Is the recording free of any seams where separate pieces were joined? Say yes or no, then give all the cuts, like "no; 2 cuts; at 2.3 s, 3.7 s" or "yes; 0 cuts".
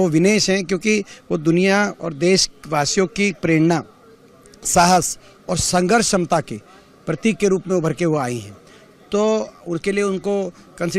yes; 0 cuts